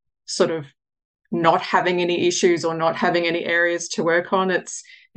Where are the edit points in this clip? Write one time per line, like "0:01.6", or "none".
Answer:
none